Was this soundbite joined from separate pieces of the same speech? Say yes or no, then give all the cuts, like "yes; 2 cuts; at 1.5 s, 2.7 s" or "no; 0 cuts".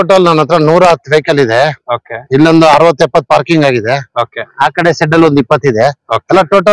no; 0 cuts